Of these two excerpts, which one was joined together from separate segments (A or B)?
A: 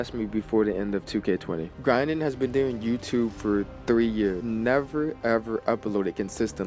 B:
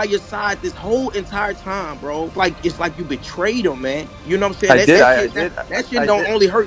A